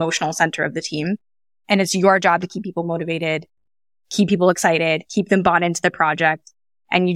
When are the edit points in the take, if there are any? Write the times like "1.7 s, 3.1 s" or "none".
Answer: none